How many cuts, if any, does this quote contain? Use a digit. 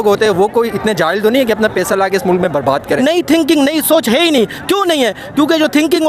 1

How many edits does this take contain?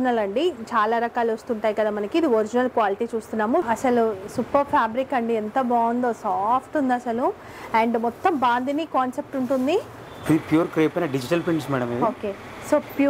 2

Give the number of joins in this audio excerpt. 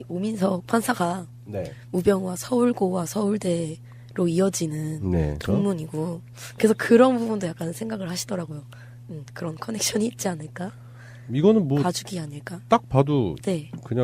1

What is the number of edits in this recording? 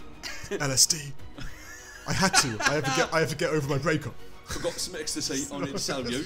0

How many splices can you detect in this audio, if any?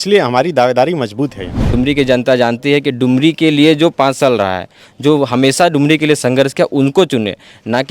1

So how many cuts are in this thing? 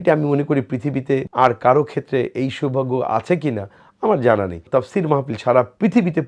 2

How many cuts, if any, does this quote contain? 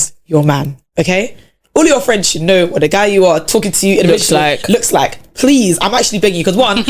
0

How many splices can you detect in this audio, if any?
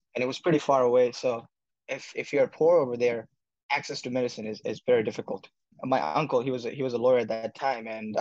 1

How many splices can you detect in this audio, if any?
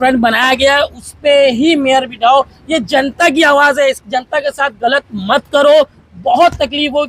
0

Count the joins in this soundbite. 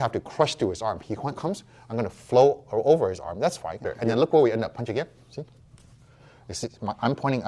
1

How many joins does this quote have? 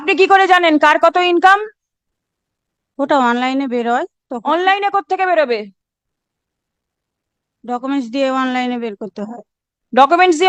0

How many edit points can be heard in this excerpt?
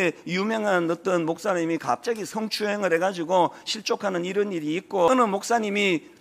1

